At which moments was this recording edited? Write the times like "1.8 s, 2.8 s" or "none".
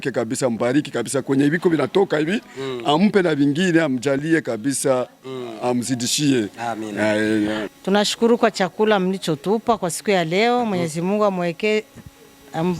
7.6 s